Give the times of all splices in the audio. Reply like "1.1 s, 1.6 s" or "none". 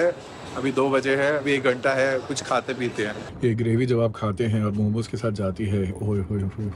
3.2 s